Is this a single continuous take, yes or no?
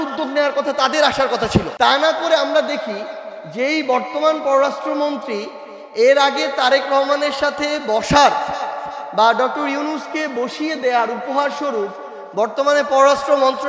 no